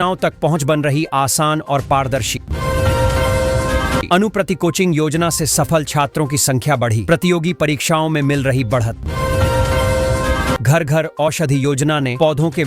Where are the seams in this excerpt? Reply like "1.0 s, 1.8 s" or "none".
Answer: 2.5 s, 4.1 s, 9.0 s, 10.6 s